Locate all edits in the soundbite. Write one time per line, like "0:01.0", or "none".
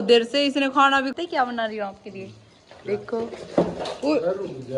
0:01.1

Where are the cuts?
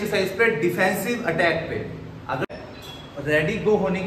0:02.5

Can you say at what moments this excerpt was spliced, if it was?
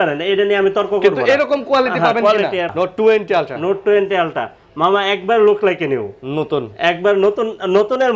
0:02.7

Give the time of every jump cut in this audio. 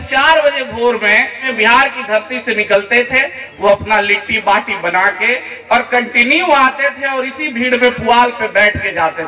0:01.4

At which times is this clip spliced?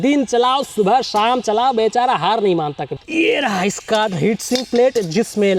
0:03.0

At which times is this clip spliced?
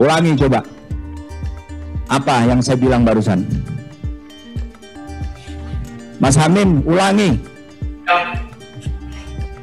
0:05.0

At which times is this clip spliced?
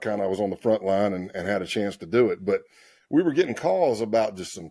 none

